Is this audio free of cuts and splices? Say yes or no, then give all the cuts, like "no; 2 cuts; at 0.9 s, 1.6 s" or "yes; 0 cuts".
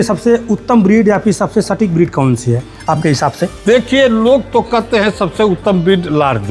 yes; 0 cuts